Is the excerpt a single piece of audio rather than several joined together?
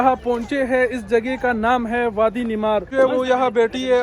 no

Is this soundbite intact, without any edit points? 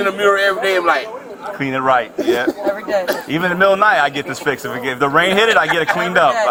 yes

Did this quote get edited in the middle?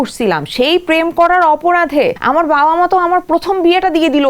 yes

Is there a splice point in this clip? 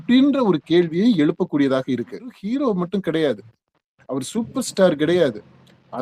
yes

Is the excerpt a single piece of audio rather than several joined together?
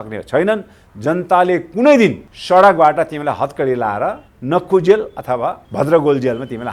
no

